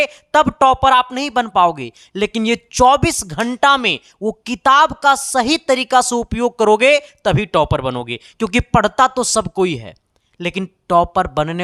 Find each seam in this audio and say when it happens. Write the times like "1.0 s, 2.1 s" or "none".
none